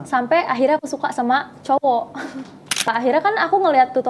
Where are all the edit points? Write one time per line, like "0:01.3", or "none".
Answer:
0:02.9